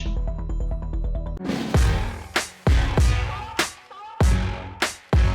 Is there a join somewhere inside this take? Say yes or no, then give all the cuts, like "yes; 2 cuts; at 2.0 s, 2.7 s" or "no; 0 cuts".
yes; 1 cut; at 1.4 s